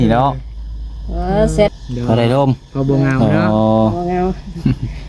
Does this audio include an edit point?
yes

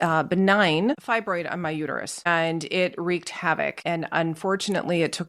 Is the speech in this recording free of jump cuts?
no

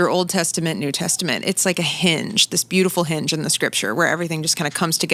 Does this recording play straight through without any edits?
yes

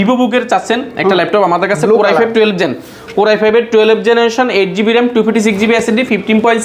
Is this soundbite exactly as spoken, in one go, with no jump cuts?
yes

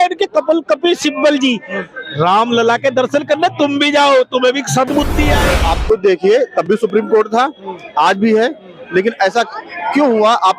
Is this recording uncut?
no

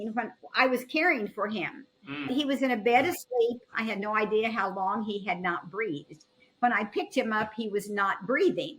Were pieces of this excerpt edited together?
yes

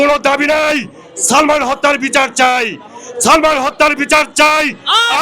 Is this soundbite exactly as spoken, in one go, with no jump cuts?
yes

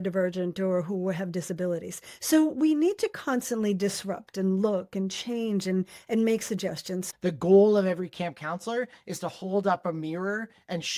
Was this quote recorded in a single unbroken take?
no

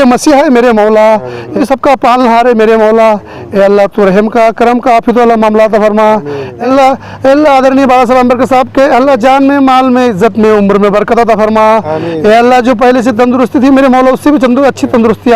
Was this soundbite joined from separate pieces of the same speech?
yes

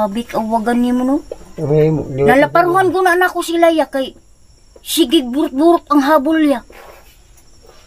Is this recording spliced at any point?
no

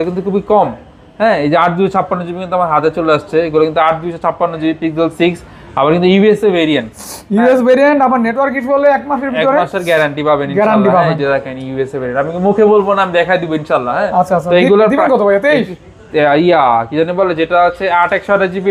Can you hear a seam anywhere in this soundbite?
no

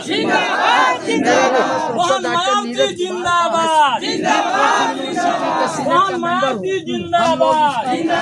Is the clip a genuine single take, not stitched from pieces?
yes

